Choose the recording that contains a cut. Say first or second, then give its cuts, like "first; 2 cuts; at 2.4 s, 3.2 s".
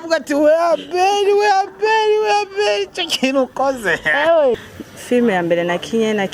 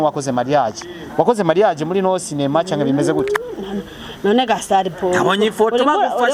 first; 1 cut; at 4.7 s